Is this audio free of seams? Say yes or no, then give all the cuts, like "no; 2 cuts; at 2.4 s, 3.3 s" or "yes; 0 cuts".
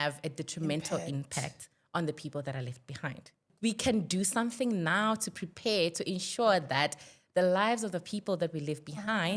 no; 1 cut; at 3.5 s